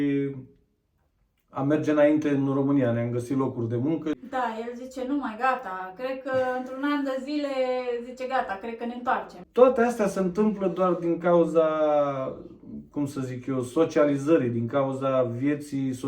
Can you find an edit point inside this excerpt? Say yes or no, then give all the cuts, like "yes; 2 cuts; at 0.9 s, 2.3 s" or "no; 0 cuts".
yes; 2 cuts; at 4.2 s, 9.4 s